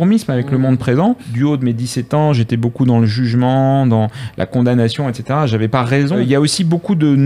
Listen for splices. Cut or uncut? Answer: cut